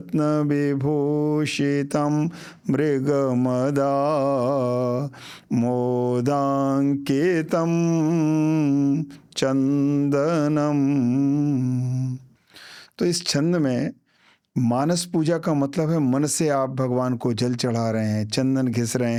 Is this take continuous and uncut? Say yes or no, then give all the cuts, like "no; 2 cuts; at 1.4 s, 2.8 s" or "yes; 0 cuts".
yes; 0 cuts